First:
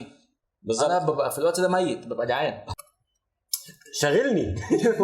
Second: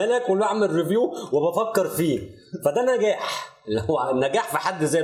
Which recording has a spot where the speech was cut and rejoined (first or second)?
first